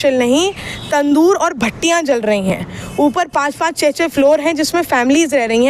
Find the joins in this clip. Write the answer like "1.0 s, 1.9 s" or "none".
none